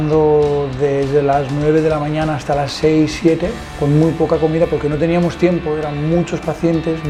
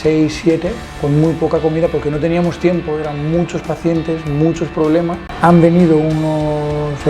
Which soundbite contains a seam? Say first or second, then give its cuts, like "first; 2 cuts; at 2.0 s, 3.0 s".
second; 1 cut; at 5.2 s